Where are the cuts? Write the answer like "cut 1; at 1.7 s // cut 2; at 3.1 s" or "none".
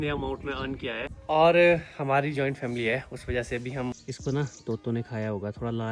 cut 1; at 1.1 s // cut 2; at 3.9 s